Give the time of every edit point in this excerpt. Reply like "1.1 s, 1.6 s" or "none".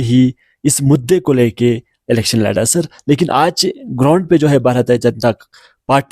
none